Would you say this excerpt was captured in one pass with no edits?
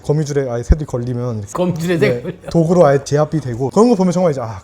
no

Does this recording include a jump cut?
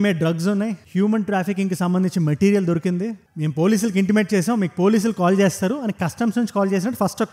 no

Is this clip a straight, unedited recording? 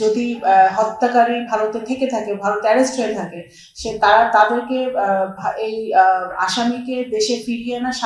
yes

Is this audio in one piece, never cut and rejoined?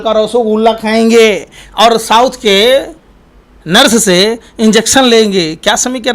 yes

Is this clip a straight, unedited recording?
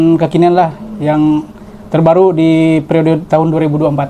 yes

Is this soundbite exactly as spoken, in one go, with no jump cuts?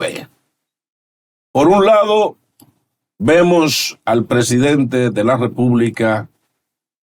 yes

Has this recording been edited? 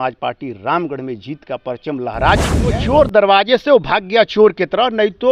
yes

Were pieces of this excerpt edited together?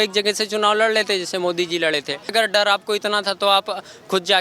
yes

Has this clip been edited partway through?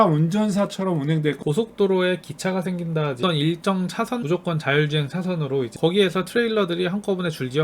yes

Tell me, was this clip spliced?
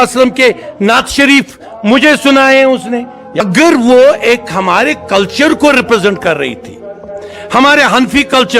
yes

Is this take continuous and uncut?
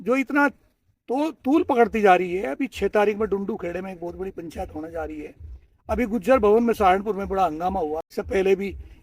no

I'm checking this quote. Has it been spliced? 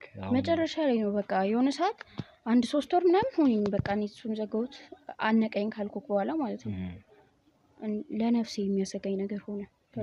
no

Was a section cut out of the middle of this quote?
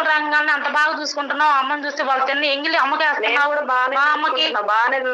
no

